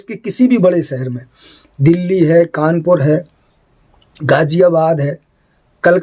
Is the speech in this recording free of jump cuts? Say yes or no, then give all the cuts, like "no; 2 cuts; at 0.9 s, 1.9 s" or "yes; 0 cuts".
yes; 0 cuts